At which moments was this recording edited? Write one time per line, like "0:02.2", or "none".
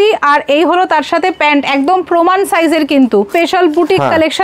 0:03.3